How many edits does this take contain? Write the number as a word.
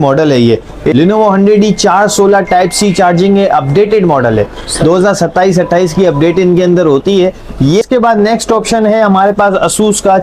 two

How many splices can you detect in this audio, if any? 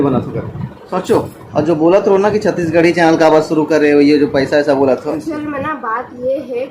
two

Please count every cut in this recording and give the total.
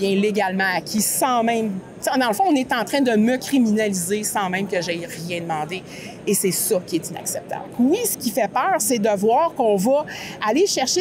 zero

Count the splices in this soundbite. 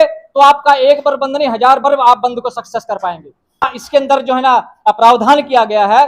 one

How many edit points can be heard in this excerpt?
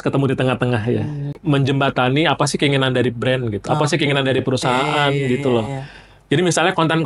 one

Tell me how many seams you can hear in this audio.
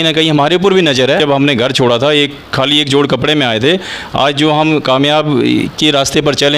one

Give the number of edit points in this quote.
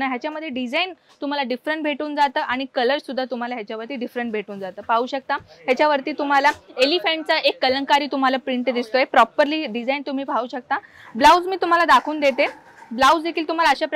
zero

